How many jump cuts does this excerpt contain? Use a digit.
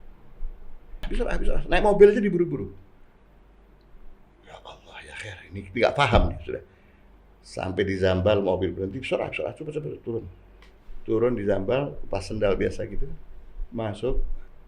1